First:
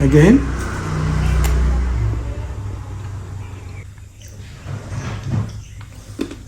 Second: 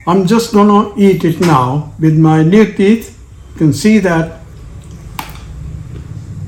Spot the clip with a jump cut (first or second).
first